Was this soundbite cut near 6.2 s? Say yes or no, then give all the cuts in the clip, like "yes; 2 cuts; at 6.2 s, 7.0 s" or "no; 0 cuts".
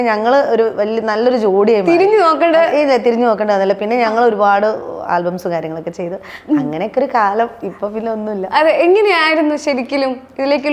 no; 0 cuts